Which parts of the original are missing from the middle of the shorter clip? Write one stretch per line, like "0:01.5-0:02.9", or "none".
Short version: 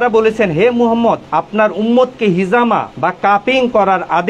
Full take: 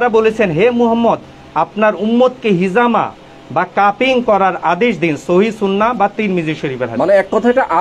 0:01.3-0:01.6
0:03.1-0:03.4